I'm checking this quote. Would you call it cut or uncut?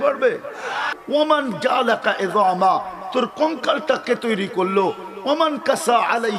cut